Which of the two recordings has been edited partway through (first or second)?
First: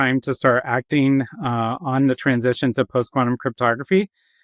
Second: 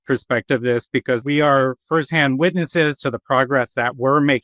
second